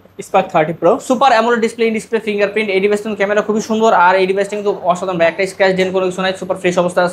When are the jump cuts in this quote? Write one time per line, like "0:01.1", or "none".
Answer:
none